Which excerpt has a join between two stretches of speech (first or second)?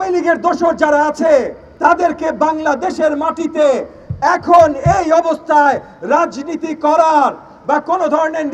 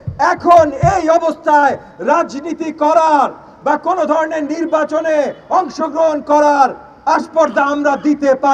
first